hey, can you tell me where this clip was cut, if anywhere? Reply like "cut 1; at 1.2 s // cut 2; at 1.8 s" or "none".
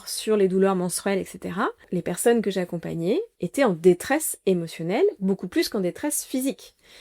cut 1; at 1.8 s